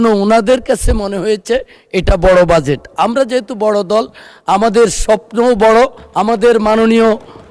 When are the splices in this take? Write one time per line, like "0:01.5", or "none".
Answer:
0:06.1